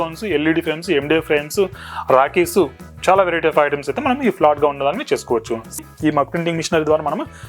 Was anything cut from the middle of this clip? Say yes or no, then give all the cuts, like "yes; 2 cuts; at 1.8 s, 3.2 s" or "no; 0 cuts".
yes; 1 cut; at 5.8 s